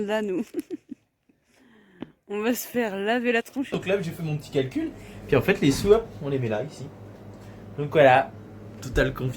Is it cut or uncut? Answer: cut